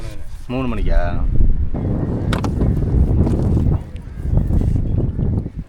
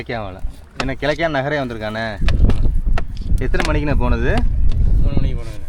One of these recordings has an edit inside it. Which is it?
first; 1 cut; at 1.7 s

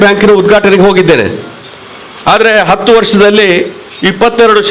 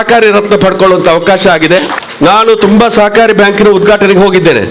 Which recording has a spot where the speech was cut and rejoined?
second; 1 cut; at 2.0 s

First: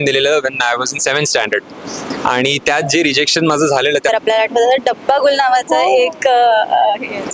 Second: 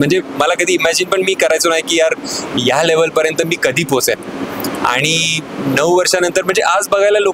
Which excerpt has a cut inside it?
first; 1 cut; at 4.1 s

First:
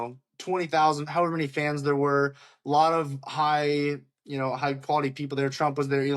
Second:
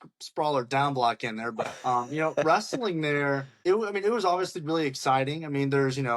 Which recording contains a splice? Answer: second; 2 cuts; at 1.7 s, 3.5 s

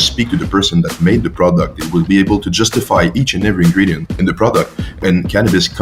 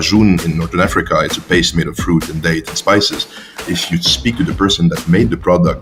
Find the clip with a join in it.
first; 1 cut; at 4.8 s

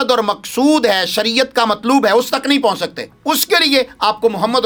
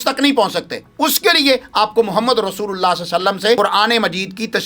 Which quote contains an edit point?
second; 1 cut; at 3.6 s

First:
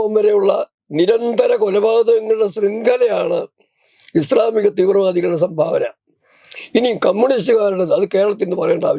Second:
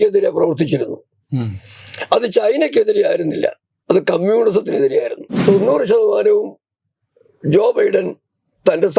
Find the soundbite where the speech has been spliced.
second; 1 cut; at 5.3 s

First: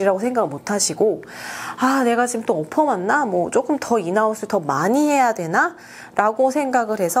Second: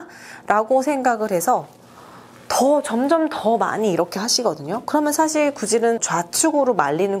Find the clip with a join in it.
second; 1 cut; at 6.1 s

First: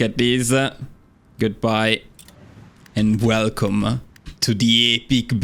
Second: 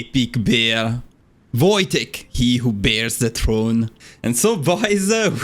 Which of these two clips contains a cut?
second; 1 cut; at 4.0 s

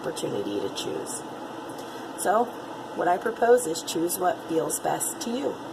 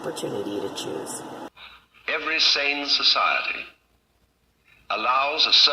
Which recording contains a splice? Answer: second; 1 cut; at 1.5 s

